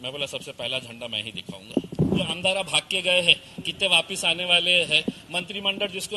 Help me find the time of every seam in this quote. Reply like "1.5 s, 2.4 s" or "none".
2.3 s